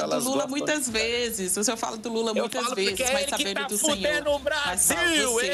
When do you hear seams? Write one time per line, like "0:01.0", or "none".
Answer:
none